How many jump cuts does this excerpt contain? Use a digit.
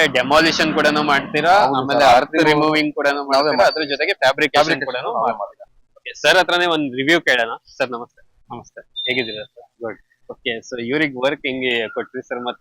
1